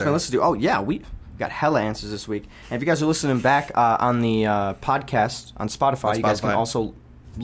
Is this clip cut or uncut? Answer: uncut